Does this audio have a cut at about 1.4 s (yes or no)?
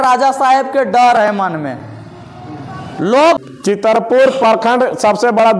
no